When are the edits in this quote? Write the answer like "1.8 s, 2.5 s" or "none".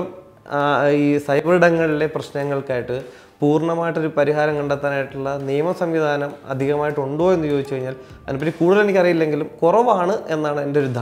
none

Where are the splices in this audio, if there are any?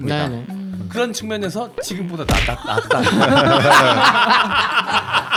none

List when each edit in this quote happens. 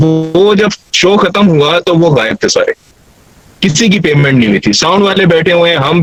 none

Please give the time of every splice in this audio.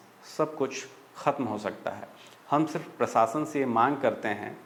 none

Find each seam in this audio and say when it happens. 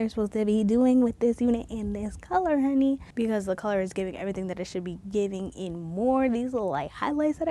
3.1 s

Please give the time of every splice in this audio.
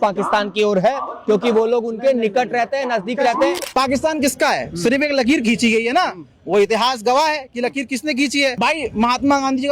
3.6 s, 8.5 s

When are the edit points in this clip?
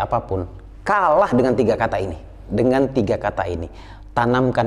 2.4 s

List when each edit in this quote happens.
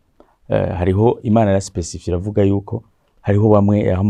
none

